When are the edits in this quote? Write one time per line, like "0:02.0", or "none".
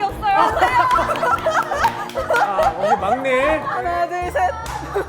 0:03.9